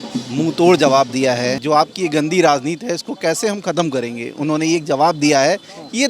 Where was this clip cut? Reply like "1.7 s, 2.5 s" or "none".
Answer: 1.6 s